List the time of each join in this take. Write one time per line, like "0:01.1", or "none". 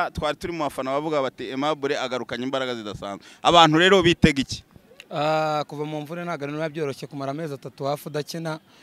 none